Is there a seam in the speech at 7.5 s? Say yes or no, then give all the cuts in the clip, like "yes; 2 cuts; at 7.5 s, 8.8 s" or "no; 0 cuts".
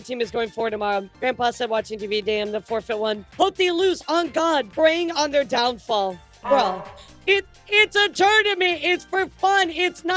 no; 1 cut; at 6.3 s